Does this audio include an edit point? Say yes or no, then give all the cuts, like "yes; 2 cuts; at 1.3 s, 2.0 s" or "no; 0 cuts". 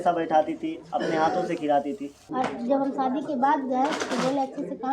yes; 1 cut; at 2.2 s